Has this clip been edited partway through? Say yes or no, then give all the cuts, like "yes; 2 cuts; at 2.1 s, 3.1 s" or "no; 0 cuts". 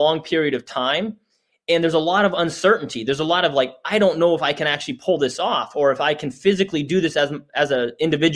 no; 0 cuts